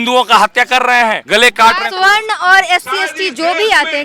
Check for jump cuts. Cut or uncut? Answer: cut